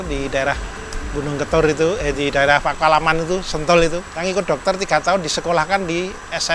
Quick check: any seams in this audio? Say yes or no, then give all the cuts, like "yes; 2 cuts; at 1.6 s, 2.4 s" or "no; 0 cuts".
yes; 1 cut; at 4.1 s